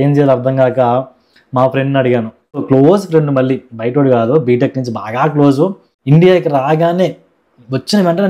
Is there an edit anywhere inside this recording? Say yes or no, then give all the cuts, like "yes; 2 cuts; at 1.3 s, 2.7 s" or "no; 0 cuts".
yes; 2 cuts; at 2.6 s, 5.9 s